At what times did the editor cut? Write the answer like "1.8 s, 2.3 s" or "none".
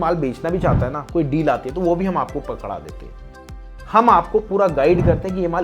3.5 s